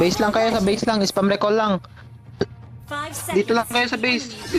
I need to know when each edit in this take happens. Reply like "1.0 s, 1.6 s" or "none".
none